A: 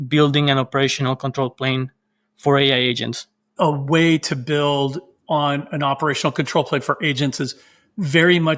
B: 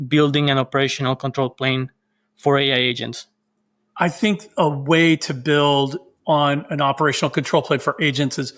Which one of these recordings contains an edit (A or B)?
A